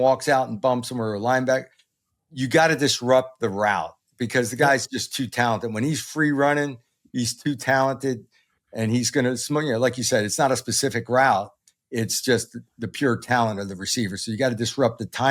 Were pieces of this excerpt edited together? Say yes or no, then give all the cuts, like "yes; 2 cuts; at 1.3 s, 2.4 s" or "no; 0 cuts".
no; 0 cuts